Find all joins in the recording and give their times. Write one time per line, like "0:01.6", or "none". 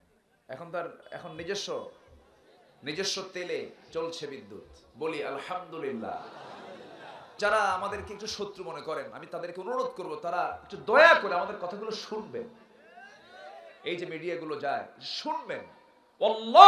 0:07.3